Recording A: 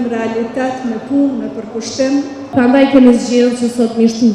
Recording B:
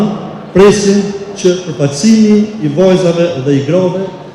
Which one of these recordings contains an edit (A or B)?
A